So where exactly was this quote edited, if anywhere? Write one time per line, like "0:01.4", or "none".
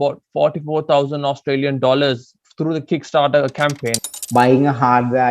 0:04.0